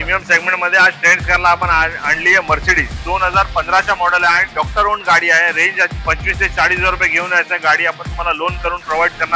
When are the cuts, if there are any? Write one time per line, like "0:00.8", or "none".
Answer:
0:03.0
0:05.9